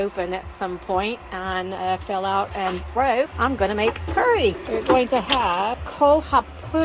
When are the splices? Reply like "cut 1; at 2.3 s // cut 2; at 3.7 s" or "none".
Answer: cut 1; at 3.3 s // cut 2; at 4.6 s // cut 3; at 5.8 s